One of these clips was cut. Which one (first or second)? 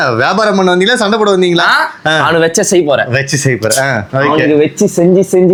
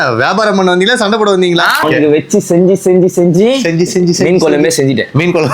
second